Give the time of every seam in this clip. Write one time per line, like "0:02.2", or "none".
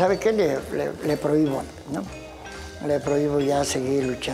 none